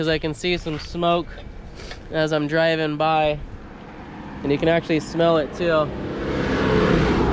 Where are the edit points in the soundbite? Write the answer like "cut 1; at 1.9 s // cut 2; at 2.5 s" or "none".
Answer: none